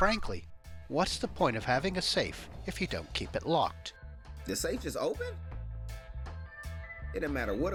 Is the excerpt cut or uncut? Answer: uncut